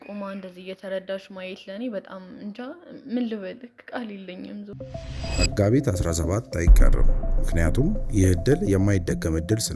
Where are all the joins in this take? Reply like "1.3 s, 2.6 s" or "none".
4.7 s

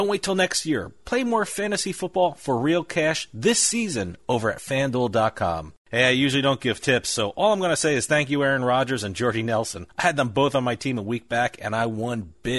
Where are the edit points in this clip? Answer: 5.8 s

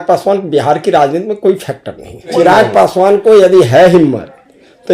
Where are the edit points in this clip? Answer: 2.3 s

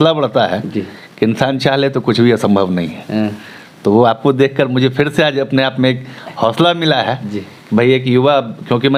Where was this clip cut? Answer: none

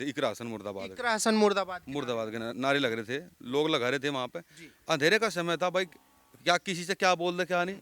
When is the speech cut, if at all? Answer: none

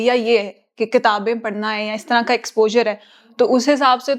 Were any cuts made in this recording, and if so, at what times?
none

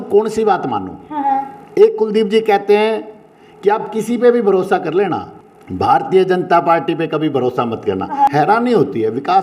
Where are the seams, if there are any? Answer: 5.3 s, 8.3 s

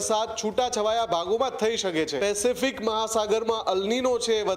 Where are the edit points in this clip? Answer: 2.1 s

